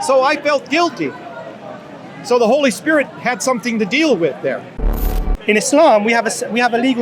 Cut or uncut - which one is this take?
cut